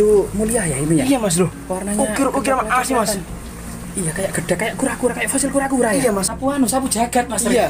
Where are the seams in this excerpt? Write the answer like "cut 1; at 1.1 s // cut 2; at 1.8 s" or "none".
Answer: cut 1; at 6.4 s

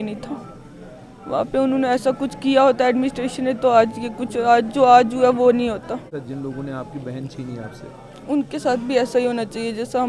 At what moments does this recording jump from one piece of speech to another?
cut 1; at 6.1 s

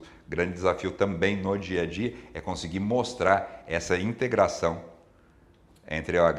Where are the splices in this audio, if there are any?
none

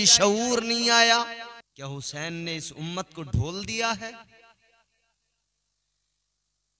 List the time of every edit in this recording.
cut 1; at 1.6 s

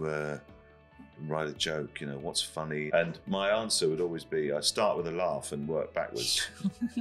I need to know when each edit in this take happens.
cut 1; at 1.1 s // cut 2; at 2.9 s

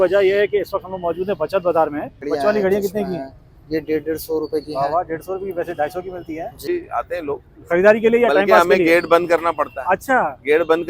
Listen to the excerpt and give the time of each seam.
cut 1; at 2.2 s // cut 2; at 6.7 s

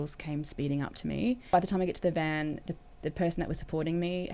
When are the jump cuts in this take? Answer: cut 1; at 1.5 s

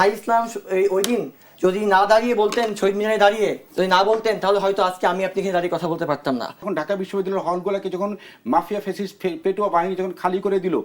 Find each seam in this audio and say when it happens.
cut 1; at 6.7 s

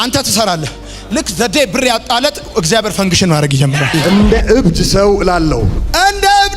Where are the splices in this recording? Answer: cut 1; at 4.0 s

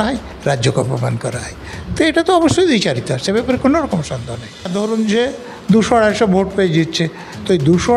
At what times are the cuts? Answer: cut 1; at 4.7 s

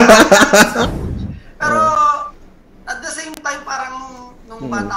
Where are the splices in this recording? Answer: cut 1; at 0.9 s

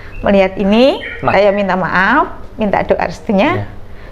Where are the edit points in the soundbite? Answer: cut 1; at 1.3 s

